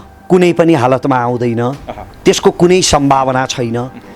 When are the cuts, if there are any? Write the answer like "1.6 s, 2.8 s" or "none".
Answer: none